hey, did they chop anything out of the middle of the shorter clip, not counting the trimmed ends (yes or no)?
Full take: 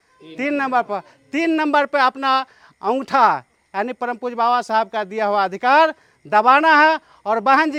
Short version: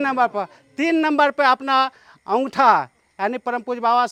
no